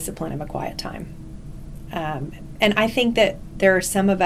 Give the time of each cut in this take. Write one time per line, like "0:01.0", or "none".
none